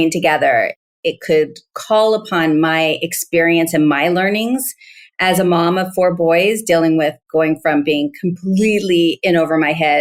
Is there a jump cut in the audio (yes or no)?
no